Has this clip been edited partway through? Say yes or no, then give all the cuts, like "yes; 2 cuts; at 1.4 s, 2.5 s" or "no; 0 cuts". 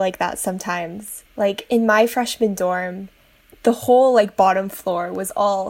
no; 0 cuts